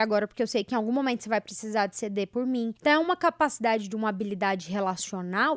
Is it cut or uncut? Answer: cut